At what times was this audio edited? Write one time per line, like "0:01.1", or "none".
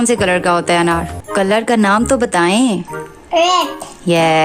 0:01.2

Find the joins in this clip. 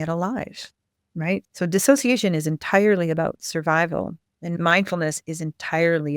0:04.5

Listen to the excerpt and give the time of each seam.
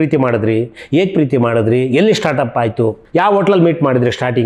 0:03.0

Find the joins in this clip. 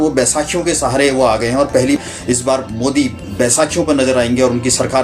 0:02.0

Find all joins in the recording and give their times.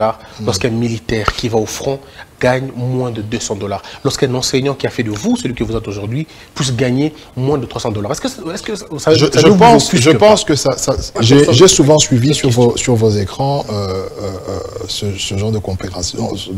0:11.2

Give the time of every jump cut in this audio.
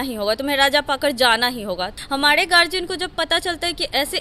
0:01.9

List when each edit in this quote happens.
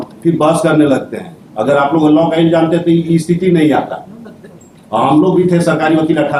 none

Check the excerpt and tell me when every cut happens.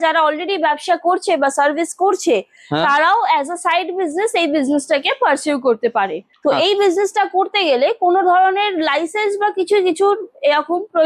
0:06.2

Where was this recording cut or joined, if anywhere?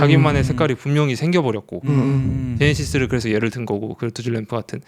none

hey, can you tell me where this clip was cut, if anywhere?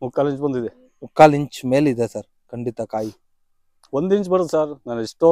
none

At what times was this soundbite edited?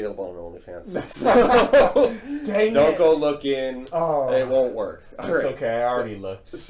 none

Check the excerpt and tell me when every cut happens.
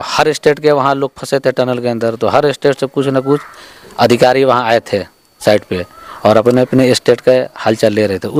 none

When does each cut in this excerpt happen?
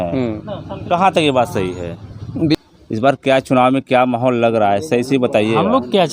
0:02.5

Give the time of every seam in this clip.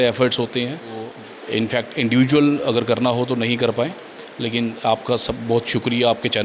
0:01.1

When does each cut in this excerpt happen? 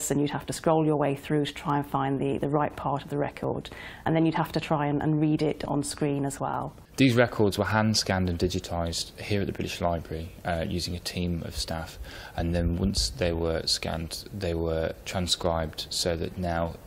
0:04.5

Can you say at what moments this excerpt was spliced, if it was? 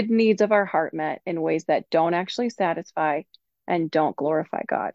none

